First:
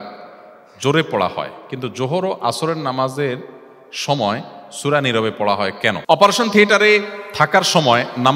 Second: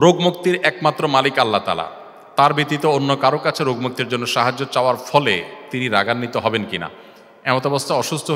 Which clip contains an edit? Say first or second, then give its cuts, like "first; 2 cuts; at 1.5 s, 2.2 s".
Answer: first; 1 cut; at 6.0 s